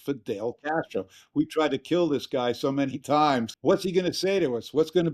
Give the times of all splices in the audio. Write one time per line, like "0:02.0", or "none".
0:03.5

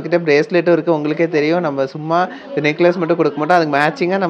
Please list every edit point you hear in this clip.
none

